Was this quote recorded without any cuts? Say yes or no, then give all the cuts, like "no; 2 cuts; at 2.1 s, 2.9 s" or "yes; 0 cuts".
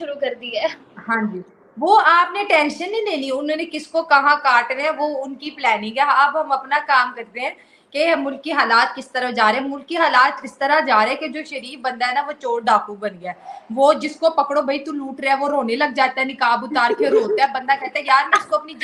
yes; 0 cuts